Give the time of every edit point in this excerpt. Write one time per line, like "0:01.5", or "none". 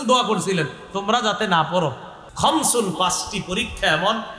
0:02.2

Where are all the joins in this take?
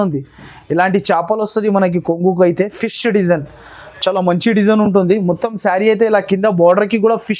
none

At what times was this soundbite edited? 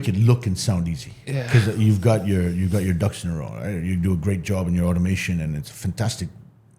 none

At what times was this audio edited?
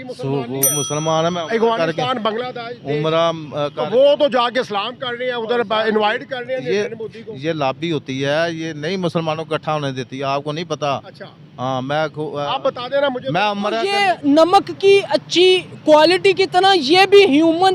0:13.9

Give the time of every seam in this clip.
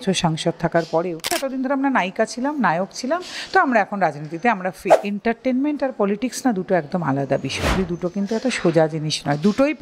0:01.4
0:05.0
0:07.8

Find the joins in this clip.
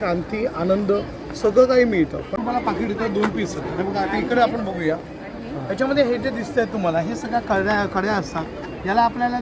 0:02.3

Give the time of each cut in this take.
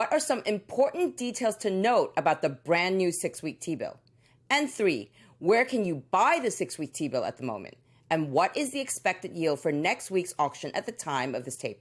0:04.8
0:07.7

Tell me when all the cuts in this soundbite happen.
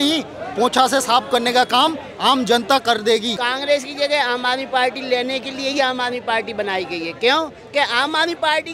0:03.3

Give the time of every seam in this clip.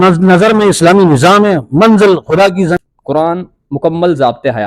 0:02.8

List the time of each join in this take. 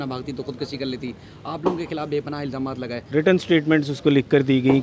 0:03.0

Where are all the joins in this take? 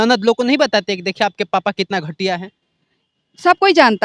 none

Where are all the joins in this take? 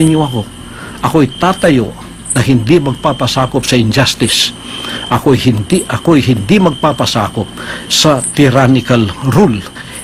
none

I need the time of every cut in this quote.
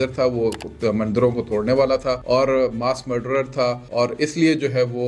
0:02.2
0:03.8

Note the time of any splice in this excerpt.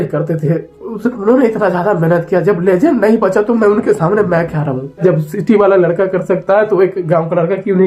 0:05.0

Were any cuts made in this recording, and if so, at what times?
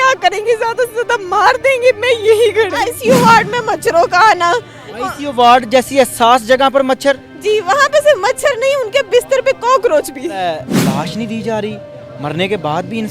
0:02.9
0:10.6

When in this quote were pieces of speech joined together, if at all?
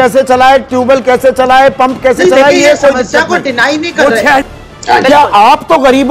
0:04.4

